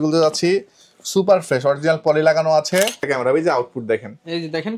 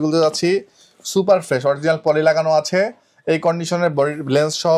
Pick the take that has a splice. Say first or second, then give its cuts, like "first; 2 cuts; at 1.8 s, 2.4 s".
first; 1 cut; at 3.0 s